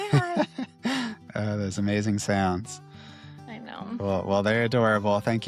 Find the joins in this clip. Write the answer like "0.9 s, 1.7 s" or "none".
none